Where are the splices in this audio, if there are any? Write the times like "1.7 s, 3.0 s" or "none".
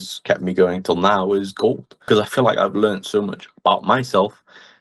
1.9 s